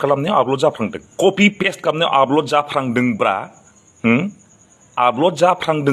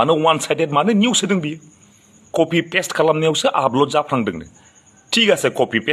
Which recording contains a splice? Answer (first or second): second